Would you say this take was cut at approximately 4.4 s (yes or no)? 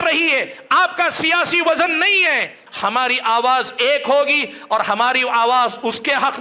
no